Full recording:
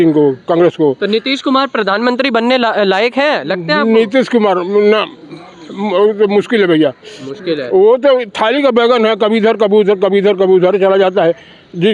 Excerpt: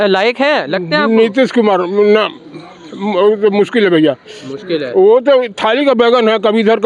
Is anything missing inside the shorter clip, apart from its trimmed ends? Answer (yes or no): no